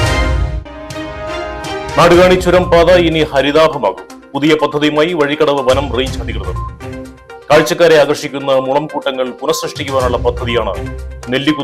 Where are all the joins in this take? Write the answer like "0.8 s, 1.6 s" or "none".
1.9 s

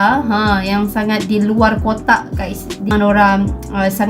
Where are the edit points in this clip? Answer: 2.9 s

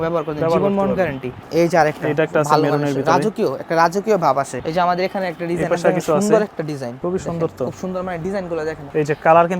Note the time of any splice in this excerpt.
1.3 s, 4.6 s, 6.9 s

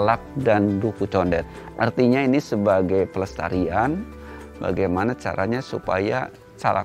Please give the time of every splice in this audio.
1.5 s

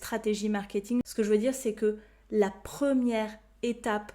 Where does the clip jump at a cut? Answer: 1.0 s

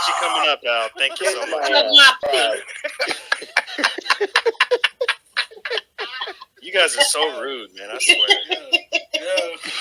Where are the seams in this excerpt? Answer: 2.2 s

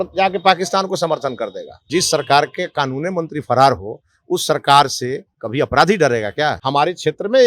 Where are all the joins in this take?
1.9 s, 6.6 s

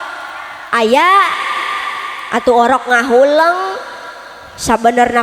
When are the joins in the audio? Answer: none

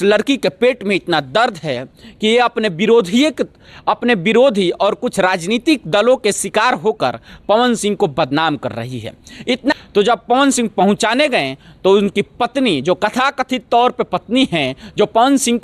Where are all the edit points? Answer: 9.7 s

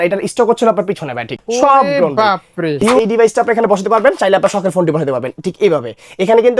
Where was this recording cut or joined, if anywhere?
1.4 s, 3.0 s

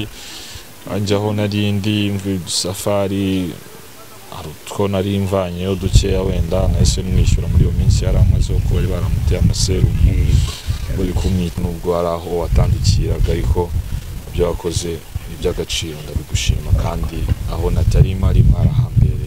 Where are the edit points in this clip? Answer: 11.6 s

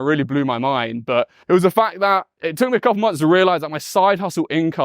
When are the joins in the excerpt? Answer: 1.4 s, 2.4 s

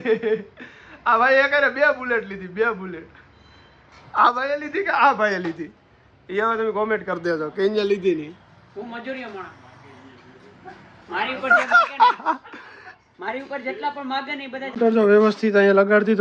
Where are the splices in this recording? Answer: 14.6 s

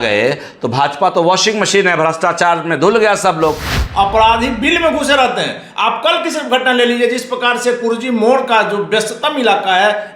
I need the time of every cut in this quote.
3.7 s

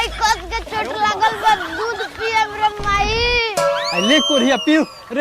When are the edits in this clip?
none

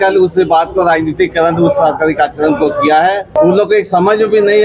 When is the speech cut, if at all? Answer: 3.4 s

